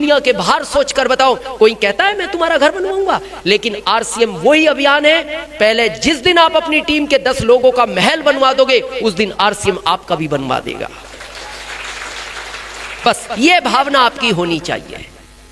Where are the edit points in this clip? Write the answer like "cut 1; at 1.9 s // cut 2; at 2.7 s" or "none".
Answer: none